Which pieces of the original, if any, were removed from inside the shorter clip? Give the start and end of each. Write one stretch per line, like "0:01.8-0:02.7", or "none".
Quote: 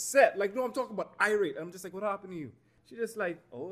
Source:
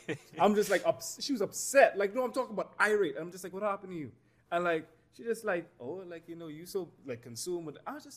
0:04.3-0:05.0

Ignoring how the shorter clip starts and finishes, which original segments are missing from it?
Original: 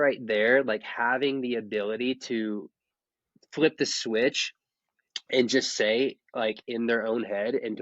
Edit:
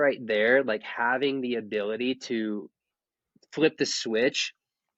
none

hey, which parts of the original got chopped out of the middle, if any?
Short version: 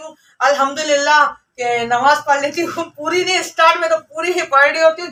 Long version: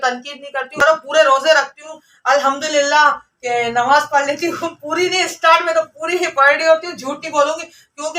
none

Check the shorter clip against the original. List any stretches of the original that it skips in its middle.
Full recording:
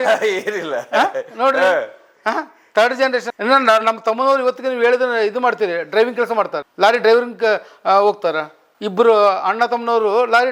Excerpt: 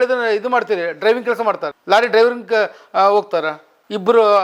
none

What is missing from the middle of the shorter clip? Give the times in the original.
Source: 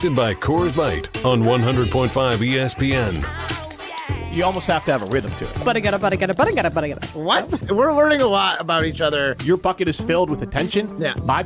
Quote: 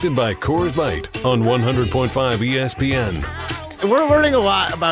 0:03.8-0:07.6

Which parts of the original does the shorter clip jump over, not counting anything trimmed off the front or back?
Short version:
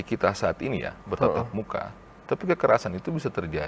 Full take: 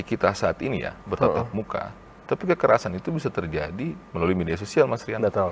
none

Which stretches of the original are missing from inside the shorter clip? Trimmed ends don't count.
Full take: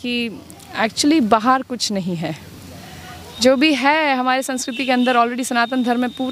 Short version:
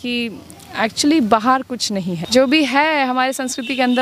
0:02.2-0:03.3

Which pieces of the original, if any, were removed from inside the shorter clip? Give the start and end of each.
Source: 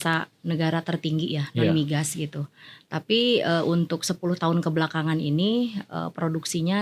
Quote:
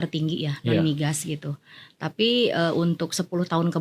none

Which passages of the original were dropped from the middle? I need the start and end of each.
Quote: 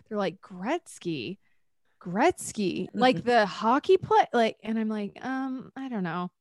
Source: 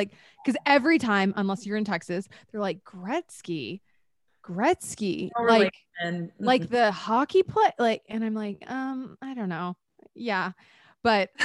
0:05.3-0:06.3

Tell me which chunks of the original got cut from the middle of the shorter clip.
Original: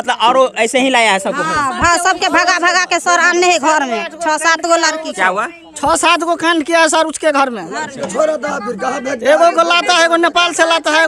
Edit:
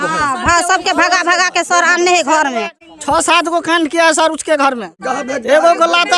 0:04.1-0:05.5
0:07.7-0:08.7

